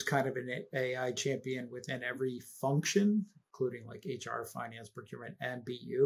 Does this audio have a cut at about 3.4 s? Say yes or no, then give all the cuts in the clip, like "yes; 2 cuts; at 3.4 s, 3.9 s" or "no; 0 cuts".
no; 0 cuts